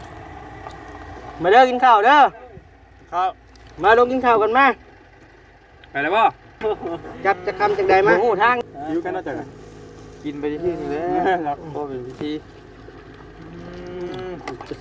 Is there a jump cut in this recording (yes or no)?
yes